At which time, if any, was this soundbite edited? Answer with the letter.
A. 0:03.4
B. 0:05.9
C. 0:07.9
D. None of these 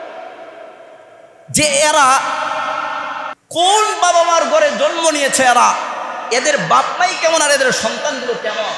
A